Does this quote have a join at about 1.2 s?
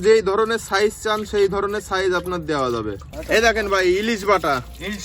no; 1 cut; at 3.1 s

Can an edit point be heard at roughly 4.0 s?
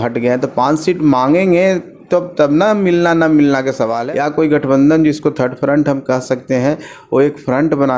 yes; 1 cut; at 4.0 s

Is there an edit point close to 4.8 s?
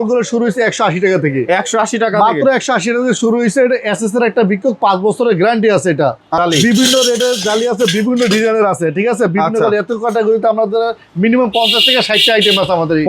no; 1 cut; at 6.4 s

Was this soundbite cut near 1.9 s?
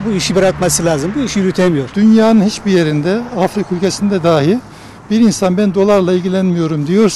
yes; 1 cut; at 1.9 s

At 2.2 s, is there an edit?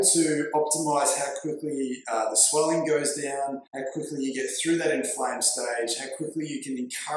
no; 1 cut; at 3.7 s

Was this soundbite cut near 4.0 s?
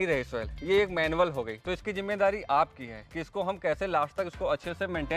no; 0 cuts

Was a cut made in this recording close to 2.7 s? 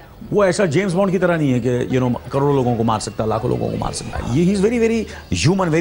no; 1 cut; at 4.1 s

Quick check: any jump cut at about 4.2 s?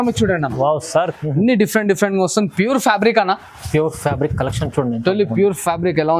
no; 1 cut; at 1.1 s

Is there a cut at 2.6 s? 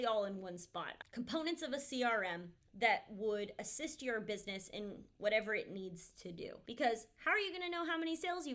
no; 2 cuts; at 1.0 s, 6.6 s

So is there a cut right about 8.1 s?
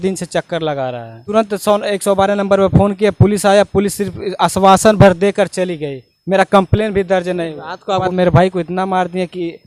yes; 2 cuts; at 1.2 s, 8.1 s

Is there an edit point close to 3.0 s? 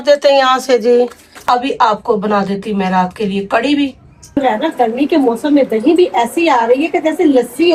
no; 2 cuts; at 1.4 s, 4.4 s

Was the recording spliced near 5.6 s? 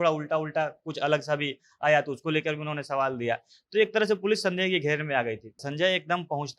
yes; 1 cut; at 5.6 s

